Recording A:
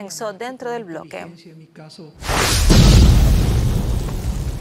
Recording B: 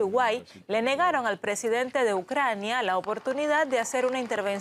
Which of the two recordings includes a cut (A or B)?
A